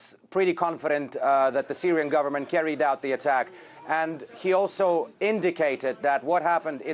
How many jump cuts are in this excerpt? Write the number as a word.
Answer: one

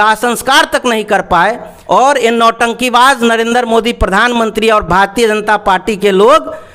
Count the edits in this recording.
one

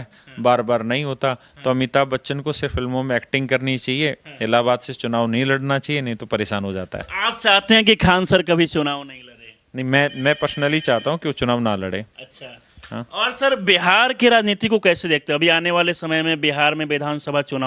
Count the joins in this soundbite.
zero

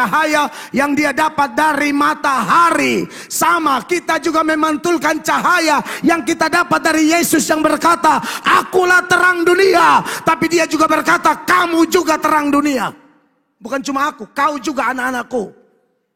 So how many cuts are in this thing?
zero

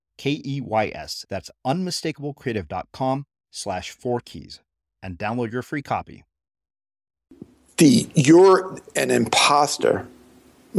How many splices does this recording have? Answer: one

